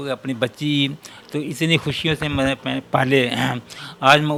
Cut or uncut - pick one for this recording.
uncut